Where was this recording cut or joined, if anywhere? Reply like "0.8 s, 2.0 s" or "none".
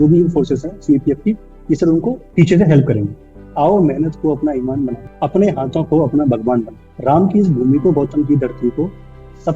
2.2 s, 3.4 s, 5.0 s, 6.8 s